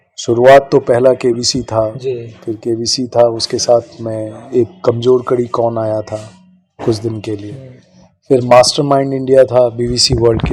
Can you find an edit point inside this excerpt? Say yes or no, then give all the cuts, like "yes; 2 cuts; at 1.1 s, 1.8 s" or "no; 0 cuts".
no; 0 cuts